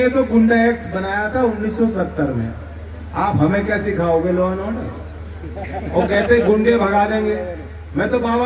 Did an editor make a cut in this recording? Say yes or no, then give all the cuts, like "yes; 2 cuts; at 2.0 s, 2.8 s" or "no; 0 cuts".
no; 0 cuts